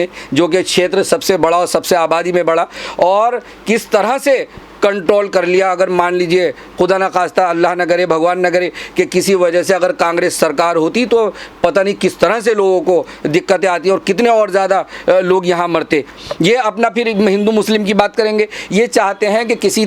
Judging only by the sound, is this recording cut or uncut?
cut